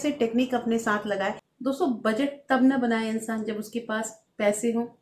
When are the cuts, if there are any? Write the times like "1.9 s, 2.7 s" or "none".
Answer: 1.5 s

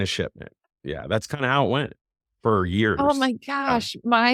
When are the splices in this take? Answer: none

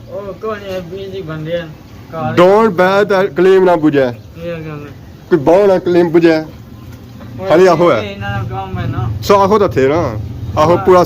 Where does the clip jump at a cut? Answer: none

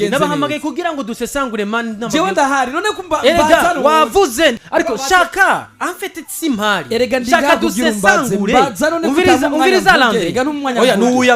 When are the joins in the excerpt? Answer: 4.6 s

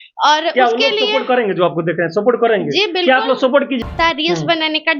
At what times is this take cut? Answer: 3.8 s

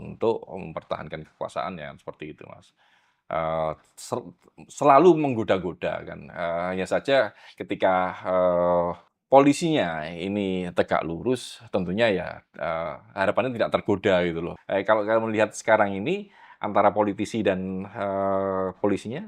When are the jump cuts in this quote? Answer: 9.1 s, 14.5 s

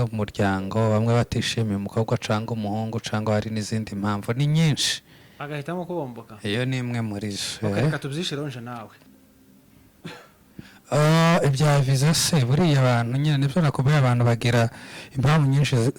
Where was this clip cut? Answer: 8.9 s

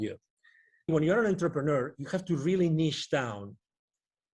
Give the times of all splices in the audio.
0.9 s

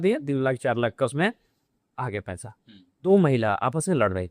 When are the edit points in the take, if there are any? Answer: 3.1 s

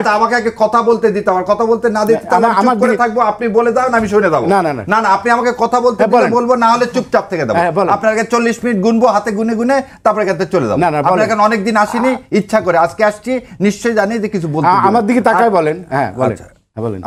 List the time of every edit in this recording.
none

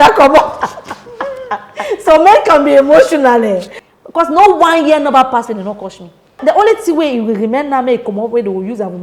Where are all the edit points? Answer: 3.7 s, 6.4 s

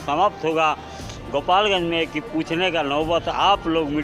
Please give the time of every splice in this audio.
none

